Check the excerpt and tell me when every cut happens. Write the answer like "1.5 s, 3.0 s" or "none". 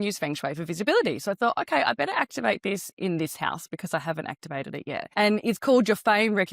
5.1 s